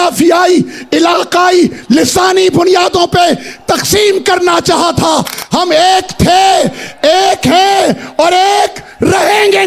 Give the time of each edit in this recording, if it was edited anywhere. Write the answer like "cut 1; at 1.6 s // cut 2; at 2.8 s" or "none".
none